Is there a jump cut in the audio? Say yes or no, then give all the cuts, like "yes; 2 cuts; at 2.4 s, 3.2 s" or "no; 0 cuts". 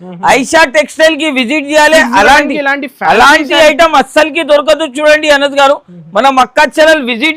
no; 0 cuts